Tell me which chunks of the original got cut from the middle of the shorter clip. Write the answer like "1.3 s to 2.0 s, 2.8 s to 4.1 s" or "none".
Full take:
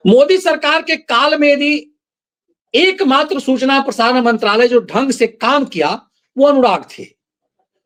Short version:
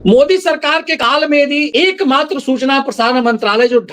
1.0 s to 1.1 s, 1.8 s to 2.7 s